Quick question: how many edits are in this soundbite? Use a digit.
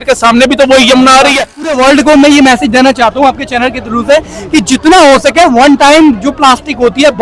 1